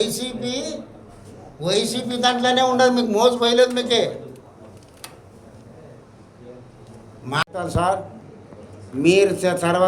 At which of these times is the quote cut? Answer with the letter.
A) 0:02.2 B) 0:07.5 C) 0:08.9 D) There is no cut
B